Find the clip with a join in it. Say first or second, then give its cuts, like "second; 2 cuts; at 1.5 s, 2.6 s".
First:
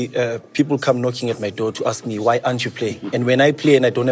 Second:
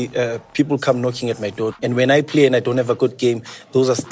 second; 1 cut; at 1.8 s